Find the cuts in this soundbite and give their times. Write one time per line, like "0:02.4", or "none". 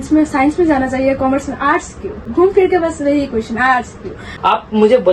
0:02.3
0:04.3